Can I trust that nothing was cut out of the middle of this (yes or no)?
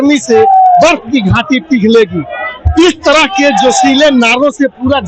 yes